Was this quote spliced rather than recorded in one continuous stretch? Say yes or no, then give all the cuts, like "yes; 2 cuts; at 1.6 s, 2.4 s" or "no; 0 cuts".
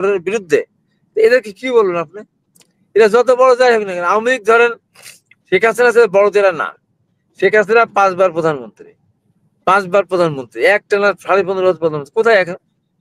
no; 0 cuts